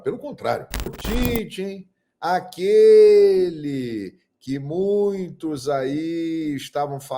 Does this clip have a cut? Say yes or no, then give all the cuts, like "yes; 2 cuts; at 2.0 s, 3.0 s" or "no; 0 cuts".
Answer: yes; 1 cut; at 1.0 s